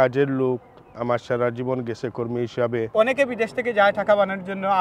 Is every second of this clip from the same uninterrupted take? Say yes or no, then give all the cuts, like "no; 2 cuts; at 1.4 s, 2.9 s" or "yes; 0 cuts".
no; 1 cut; at 2.9 s